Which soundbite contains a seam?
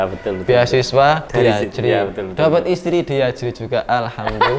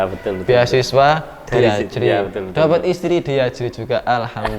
first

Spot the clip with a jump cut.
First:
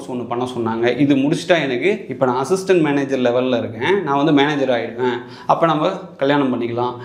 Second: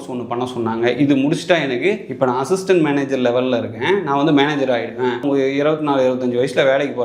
second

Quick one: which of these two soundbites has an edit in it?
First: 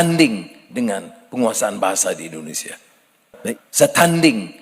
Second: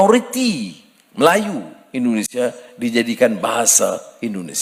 first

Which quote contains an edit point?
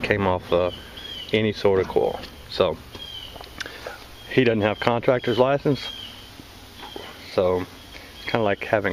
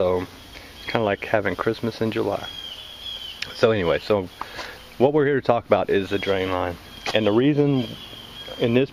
first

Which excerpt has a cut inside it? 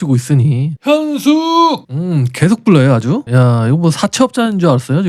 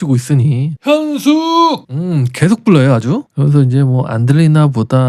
first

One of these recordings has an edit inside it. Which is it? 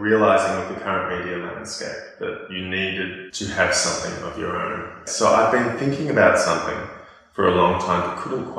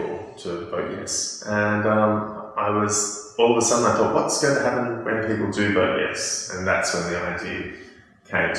first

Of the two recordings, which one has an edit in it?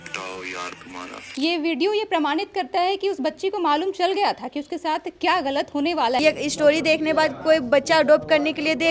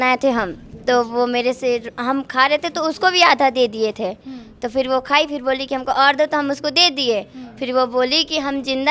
first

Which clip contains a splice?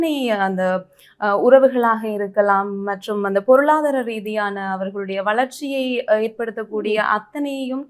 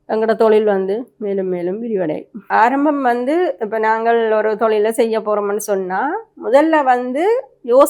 second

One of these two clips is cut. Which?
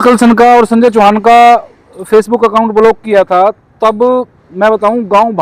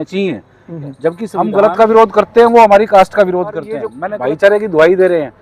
second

